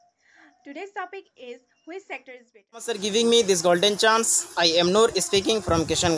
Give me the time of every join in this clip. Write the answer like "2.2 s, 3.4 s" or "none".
2.7 s